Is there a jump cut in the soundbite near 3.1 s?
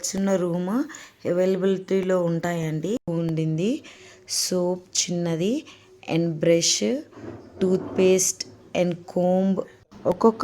yes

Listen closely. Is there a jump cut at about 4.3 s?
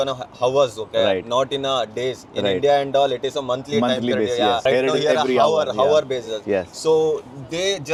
no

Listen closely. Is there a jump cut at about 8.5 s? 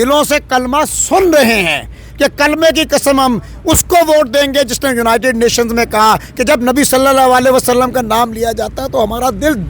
no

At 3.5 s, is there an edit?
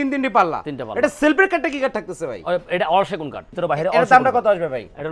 yes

